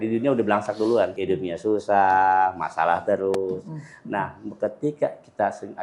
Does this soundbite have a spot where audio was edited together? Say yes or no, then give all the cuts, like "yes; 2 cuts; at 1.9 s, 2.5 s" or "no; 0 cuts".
yes; 1 cut; at 1.2 s